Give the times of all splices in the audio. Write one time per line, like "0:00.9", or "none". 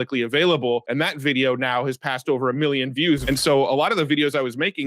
0:03.2